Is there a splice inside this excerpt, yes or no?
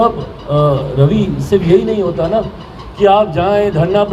no